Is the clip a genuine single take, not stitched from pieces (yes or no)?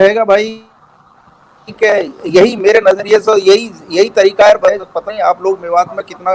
yes